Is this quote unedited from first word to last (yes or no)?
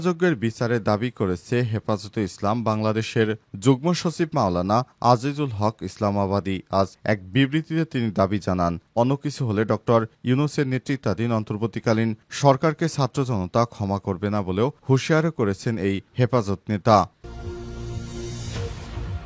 no